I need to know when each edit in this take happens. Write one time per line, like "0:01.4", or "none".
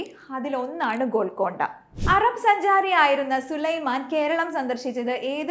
0:01.9